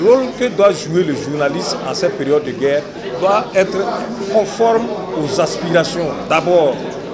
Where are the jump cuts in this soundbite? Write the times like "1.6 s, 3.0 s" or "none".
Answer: none

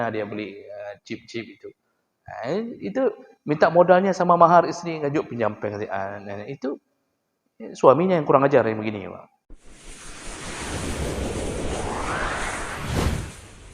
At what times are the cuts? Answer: 9.6 s

